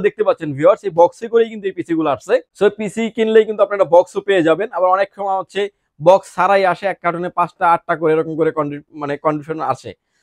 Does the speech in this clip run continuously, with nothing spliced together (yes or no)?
yes